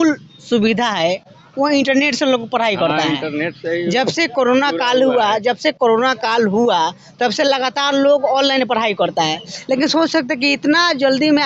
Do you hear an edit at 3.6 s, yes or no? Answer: no